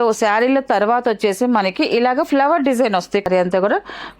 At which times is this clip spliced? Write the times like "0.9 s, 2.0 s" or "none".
3.3 s